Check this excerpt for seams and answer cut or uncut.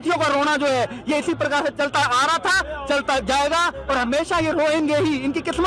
uncut